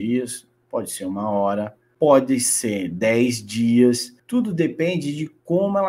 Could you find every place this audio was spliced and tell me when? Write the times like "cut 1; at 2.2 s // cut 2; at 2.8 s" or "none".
cut 1; at 1.8 s // cut 2; at 4.1 s